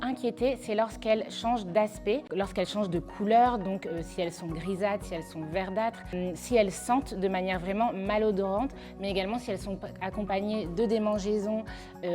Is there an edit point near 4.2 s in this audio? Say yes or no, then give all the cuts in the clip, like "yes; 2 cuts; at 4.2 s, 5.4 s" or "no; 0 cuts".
no; 2 cuts; at 2.3 s, 6.1 s